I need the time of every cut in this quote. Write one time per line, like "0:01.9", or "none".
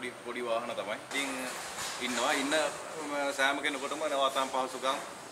0:01.1